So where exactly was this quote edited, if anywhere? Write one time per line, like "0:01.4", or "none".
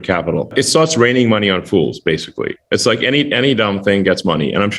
none